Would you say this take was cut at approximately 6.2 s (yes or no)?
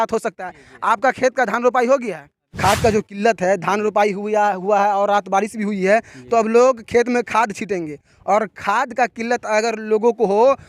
no